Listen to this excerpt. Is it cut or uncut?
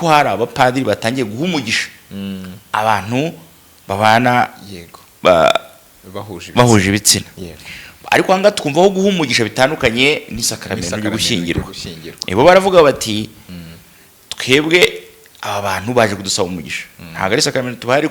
uncut